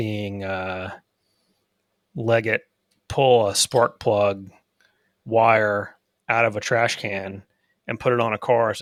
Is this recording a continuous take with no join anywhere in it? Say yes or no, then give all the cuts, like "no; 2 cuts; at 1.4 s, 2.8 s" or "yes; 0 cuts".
yes; 0 cuts